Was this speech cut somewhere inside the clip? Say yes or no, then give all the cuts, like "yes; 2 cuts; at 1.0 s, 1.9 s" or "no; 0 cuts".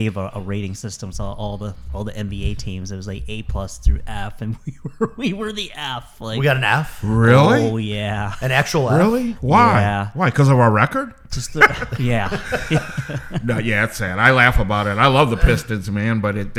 no; 0 cuts